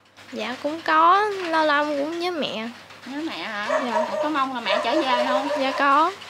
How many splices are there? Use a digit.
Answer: 0